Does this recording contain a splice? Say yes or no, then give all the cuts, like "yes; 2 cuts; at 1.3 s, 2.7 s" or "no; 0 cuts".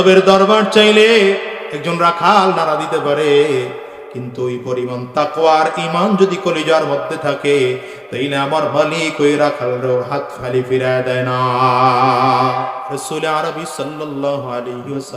yes; 1 cut; at 12.9 s